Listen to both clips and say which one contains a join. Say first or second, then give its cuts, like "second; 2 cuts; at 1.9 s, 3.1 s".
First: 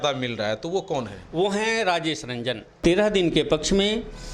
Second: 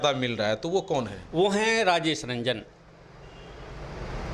first; 1 cut; at 2.8 s